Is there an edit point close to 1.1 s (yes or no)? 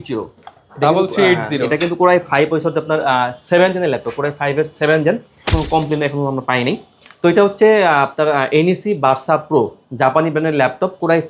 no